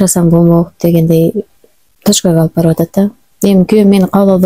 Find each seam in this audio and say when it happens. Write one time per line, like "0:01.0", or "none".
none